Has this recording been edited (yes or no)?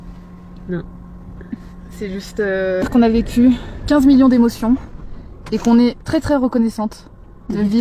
yes